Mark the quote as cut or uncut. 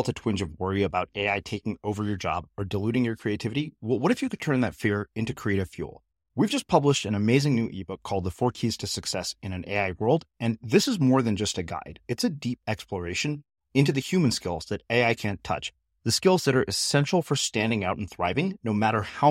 uncut